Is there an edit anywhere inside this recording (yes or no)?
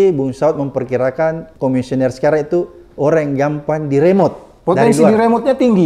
yes